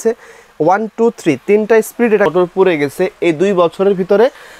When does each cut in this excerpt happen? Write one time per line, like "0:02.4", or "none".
0:02.3